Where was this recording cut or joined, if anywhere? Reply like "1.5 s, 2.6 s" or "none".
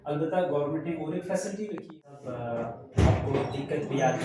1.7 s